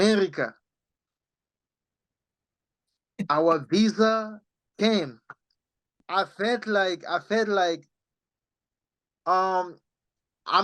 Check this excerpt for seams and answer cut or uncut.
cut